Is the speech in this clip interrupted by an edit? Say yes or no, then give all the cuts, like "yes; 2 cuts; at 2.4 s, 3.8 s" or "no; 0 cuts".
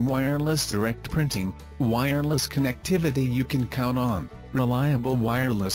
yes; 1 cut; at 1.6 s